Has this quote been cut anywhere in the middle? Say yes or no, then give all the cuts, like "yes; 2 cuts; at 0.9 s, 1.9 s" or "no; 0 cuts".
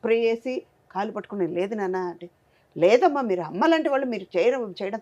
no; 0 cuts